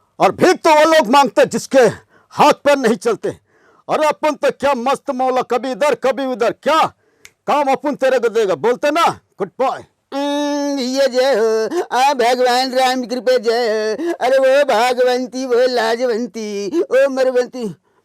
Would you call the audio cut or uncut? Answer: cut